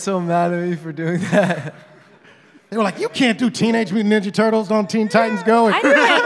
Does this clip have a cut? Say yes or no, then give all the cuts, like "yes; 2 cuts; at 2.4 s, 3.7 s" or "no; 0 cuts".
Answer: no; 0 cuts